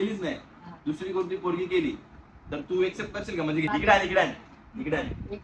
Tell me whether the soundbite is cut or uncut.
cut